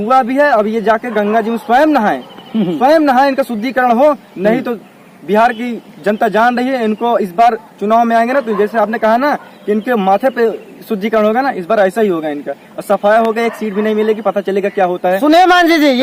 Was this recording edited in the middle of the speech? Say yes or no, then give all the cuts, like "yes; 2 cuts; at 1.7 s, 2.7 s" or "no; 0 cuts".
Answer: no; 0 cuts